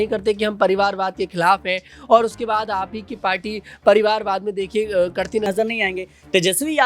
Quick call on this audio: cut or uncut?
cut